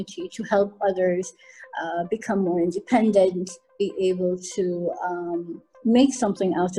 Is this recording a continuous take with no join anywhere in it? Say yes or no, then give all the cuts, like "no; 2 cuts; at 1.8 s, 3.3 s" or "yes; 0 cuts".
no; 1 cut; at 5.6 s